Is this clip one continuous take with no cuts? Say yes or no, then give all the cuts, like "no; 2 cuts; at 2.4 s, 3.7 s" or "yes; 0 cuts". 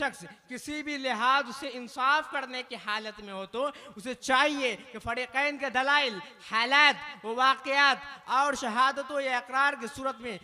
yes; 0 cuts